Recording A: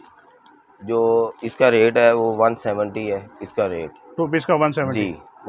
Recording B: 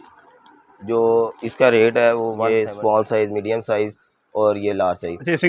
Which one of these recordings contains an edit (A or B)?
B